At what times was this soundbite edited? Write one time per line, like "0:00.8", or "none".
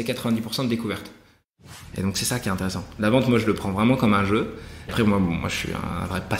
0:01.5
0:04.9